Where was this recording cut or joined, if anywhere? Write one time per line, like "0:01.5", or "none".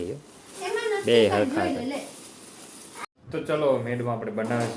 0:02.8